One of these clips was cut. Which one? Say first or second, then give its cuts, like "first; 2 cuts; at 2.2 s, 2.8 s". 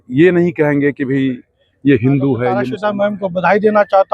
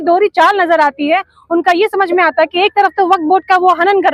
first; 1 cut; at 2.7 s